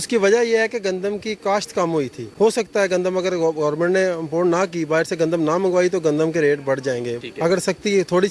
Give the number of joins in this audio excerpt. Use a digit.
1